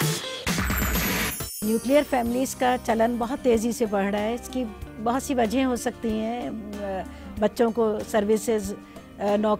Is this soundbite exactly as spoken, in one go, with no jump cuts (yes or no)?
no